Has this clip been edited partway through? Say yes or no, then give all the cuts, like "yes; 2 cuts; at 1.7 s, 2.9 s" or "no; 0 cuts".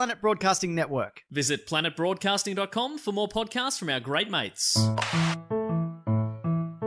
yes; 1 cut; at 4.8 s